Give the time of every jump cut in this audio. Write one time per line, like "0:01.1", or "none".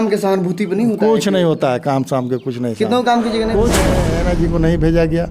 0:04.0